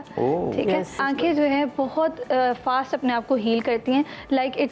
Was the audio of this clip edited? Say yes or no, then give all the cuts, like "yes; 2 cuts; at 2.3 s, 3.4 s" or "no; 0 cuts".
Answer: yes; 1 cut; at 1.0 s